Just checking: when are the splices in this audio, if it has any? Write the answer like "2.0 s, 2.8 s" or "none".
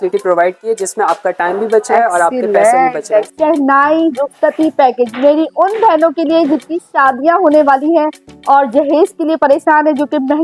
3.3 s